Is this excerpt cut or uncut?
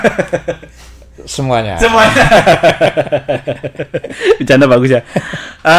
uncut